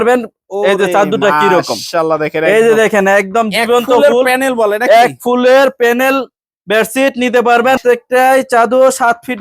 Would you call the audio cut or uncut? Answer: cut